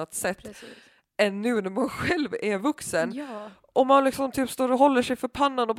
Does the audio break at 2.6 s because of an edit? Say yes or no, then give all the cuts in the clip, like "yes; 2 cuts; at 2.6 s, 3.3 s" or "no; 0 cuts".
no; 0 cuts